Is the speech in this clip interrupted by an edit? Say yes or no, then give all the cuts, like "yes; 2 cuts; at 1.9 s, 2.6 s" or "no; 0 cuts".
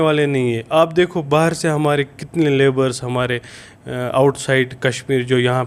no; 0 cuts